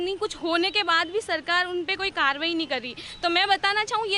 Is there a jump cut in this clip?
no; 0 cuts

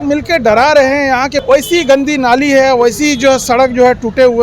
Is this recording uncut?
no; 1 cut; at 1.4 s

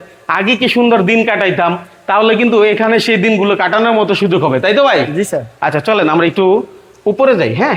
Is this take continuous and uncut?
yes; 0 cuts

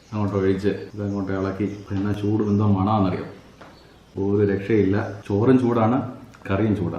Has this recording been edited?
yes; 3 cuts; at 0.9 s, 1.8 s, 5.1 s

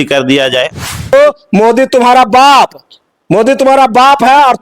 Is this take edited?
yes; 1 cut; at 1.1 s

